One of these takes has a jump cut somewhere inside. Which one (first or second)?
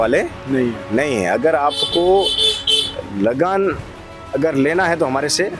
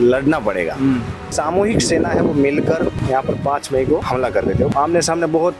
second